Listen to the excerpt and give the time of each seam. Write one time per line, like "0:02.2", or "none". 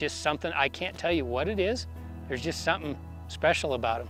none